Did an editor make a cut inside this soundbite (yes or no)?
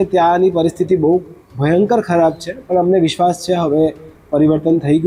no